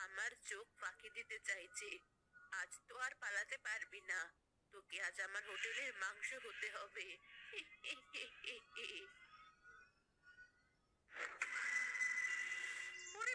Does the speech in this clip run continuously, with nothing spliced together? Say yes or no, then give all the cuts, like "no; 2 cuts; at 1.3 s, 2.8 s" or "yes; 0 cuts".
yes; 0 cuts